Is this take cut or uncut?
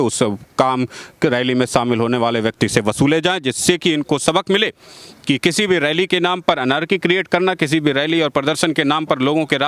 uncut